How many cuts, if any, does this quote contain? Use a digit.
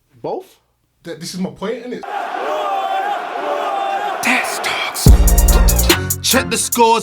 1